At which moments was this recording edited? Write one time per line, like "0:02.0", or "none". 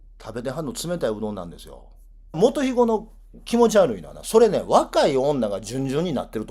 0:02.4